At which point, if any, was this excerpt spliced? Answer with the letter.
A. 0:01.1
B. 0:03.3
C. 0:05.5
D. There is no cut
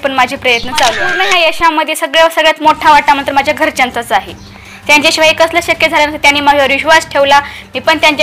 A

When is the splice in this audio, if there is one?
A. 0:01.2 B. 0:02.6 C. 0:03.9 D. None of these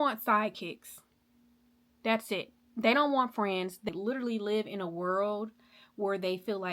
C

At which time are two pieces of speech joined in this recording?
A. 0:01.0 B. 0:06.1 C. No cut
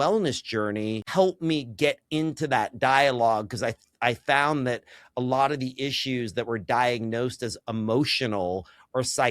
A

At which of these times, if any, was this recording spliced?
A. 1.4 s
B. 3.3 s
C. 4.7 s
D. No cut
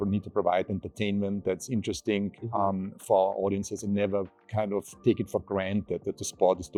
D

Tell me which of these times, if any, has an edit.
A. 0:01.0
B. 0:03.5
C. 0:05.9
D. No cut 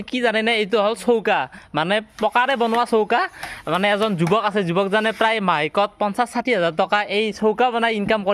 D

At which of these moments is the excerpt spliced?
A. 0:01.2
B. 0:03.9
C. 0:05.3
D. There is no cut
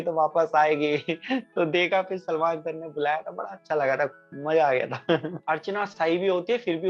C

